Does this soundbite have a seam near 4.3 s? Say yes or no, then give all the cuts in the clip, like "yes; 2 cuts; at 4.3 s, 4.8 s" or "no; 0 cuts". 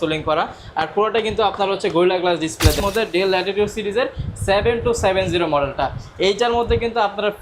no; 1 cut; at 2.8 s